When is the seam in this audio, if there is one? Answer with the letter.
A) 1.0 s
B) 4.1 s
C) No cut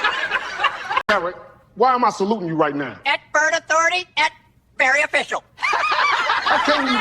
A